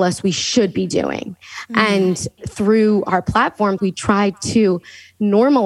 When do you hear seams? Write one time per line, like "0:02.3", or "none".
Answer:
0:03.8